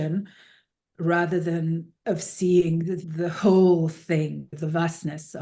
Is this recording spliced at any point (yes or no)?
yes